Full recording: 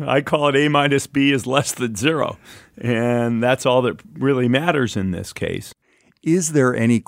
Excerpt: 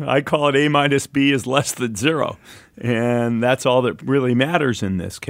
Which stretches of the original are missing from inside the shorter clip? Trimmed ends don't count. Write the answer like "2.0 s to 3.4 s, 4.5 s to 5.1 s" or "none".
4.0 s to 4.1 s